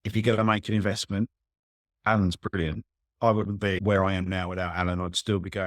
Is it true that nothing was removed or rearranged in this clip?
no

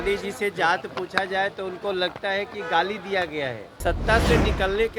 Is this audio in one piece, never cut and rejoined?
no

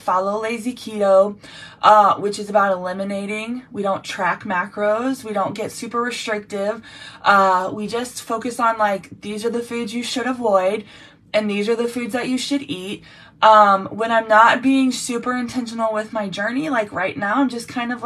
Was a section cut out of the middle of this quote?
no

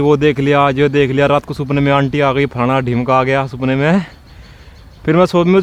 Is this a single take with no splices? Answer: yes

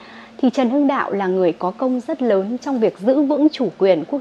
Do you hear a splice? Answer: no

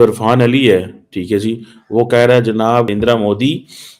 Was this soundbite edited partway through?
yes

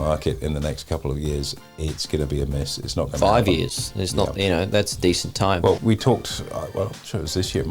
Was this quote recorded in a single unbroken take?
no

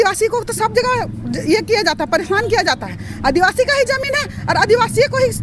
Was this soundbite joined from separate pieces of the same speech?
no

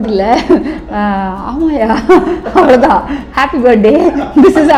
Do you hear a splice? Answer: no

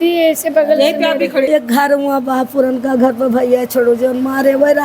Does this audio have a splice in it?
yes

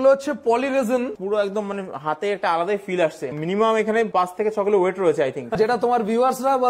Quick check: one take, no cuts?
no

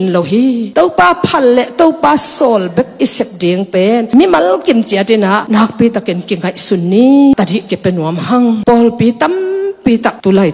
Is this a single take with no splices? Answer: no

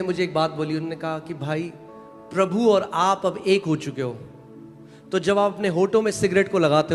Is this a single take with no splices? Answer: yes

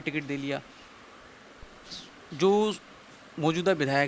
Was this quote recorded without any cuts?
no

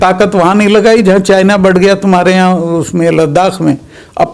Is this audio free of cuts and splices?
yes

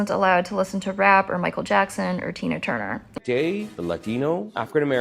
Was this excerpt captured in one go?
no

